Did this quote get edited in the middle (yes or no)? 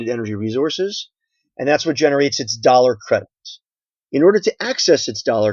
no